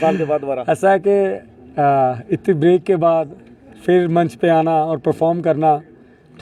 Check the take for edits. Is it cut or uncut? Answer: uncut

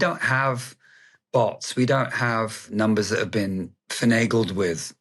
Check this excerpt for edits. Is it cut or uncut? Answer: cut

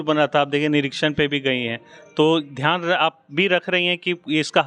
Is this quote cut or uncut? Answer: uncut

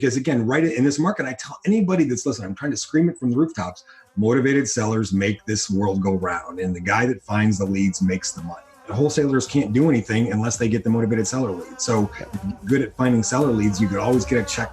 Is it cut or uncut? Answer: cut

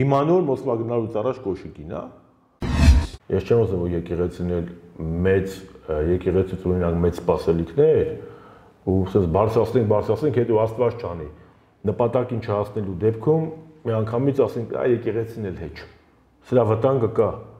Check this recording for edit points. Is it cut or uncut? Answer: cut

